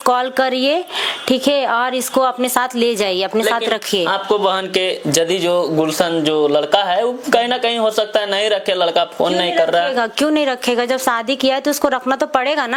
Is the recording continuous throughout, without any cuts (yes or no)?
yes